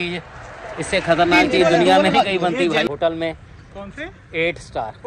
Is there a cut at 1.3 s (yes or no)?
no